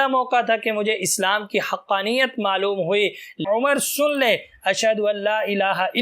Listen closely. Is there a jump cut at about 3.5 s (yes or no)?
yes